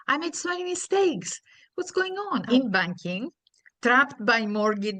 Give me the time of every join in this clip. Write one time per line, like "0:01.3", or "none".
0:02.5